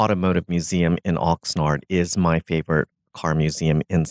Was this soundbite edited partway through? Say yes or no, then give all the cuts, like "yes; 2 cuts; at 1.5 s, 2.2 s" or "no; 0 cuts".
no; 0 cuts